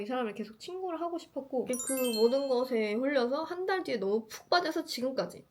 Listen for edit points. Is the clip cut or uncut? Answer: cut